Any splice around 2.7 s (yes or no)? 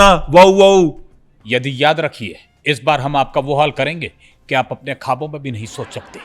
no